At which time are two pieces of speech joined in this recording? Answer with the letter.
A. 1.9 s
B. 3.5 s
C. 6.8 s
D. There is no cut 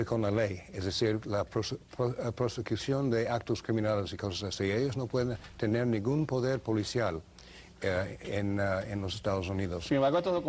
C